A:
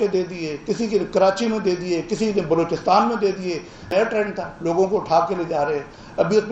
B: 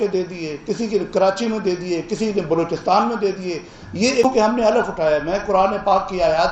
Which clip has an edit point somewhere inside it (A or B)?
B